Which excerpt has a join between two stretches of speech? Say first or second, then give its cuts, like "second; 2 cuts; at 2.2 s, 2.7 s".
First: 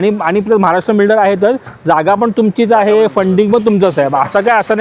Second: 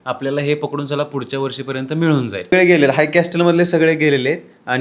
second; 1 cut; at 2.5 s